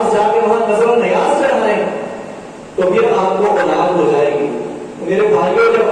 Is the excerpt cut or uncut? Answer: uncut